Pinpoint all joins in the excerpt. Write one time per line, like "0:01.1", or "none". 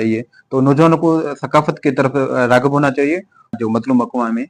0:03.6